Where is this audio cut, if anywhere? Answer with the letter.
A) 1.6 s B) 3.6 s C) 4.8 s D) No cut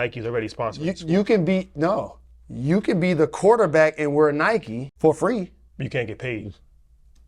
C